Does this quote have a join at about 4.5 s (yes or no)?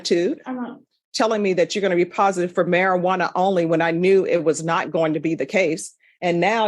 no